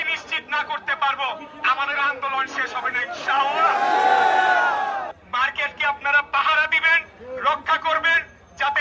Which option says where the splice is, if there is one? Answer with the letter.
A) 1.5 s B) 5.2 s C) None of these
C